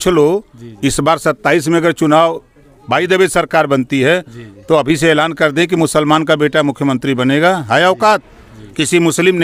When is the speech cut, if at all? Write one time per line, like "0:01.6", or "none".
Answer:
none